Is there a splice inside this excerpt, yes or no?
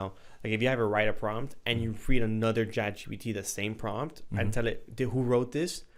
no